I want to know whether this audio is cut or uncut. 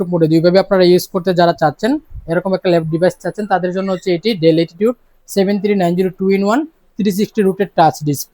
uncut